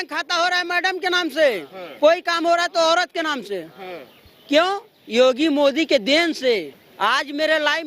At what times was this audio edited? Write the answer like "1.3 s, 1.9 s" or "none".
6.8 s